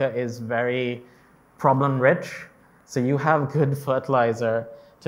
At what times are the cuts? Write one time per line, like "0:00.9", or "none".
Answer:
none